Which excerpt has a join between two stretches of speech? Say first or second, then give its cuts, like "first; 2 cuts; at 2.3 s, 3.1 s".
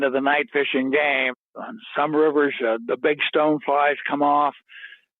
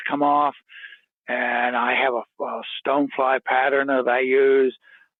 first; 1 cut; at 1.3 s